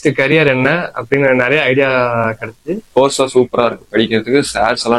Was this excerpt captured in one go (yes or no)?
no